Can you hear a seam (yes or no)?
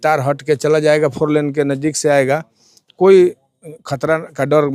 no